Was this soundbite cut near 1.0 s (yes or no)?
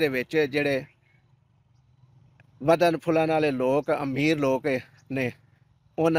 no